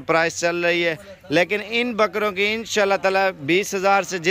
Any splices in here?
no; 0 cuts

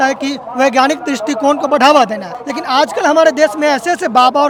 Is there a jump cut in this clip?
no; 0 cuts

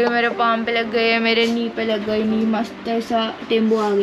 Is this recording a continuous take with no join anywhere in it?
yes; 0 cuts

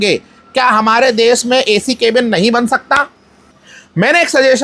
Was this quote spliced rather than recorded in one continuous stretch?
yes; 1 cut; at 3.2 s

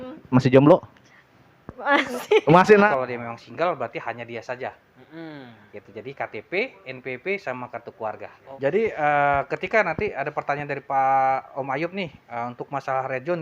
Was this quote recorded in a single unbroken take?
no; 2 cuts; at 2.9 s, 8.4 s

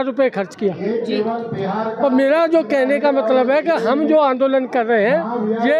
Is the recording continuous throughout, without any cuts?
yes; 0 cuts

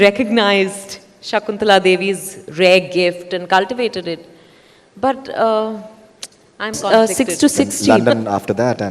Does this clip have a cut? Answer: yes; 1 cut; at 6.9 s

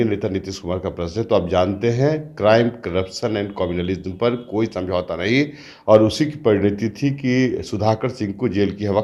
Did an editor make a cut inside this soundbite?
no; 0 cuts

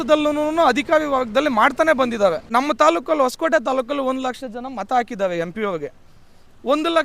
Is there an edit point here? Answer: yes; 1 cut; at 2.4 s

